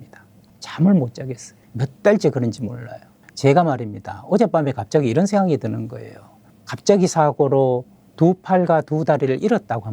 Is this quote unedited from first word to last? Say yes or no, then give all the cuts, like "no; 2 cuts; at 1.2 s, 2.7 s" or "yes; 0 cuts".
no; 1 cut; at 3.2 s